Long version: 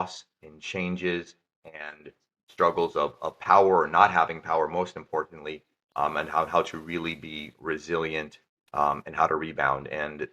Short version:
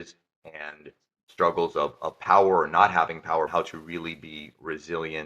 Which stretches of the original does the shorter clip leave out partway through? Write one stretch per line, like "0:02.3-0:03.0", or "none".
0:04.7-0:06.5